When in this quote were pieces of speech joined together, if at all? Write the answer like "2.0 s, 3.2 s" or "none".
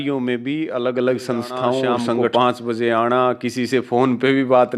2.3 s